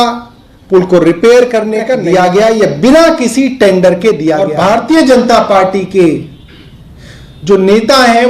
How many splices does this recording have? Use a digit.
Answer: 2